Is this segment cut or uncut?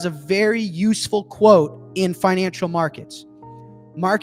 uncut